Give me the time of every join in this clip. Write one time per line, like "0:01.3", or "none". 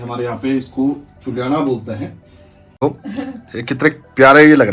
0:02.8